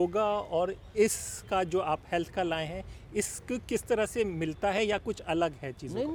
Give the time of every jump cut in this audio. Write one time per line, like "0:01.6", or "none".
none